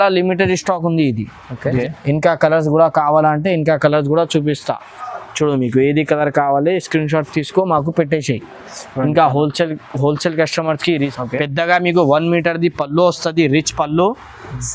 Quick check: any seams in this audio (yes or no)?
yes